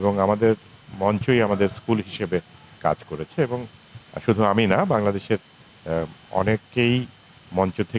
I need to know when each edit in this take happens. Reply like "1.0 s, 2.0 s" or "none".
none